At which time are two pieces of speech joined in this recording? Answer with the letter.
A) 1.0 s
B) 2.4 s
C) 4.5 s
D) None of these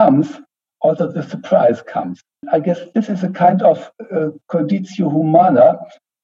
B